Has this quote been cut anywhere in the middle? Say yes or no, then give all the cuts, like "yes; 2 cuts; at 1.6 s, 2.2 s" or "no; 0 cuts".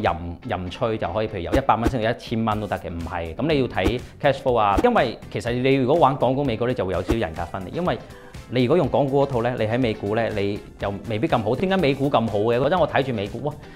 yes; 3 cuts; at 4.8 s, 11.6 s, 12.6 s